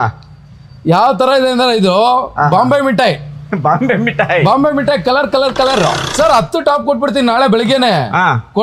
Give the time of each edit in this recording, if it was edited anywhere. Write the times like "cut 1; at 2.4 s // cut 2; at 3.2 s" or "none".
cut 1; at 6.0 s